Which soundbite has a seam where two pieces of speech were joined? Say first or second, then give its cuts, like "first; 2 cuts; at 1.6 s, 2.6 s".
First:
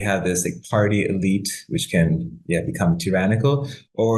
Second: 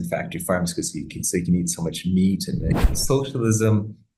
second; 1 cut; at 2.8 s